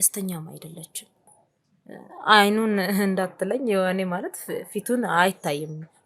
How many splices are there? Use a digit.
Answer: 1